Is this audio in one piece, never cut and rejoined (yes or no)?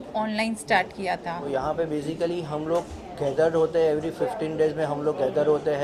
no